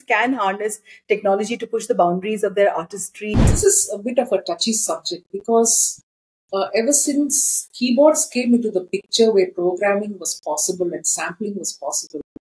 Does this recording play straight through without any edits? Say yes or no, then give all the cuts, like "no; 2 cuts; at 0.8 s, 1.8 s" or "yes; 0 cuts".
no; 1 cut; at 3.5 s